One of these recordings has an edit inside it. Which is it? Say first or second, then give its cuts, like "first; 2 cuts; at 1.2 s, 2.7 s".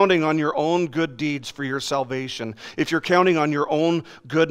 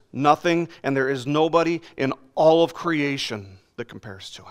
second; 1 cut; at 3.6 s